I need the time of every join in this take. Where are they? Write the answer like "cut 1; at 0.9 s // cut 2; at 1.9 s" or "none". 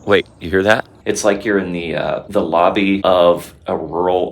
cut 1; at 0.9 s // cut 2; at 2.2 s // cut 3; at 3.0 s